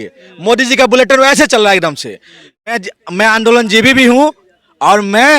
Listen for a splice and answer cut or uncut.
cut